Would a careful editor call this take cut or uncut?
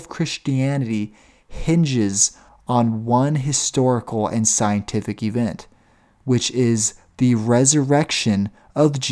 uncut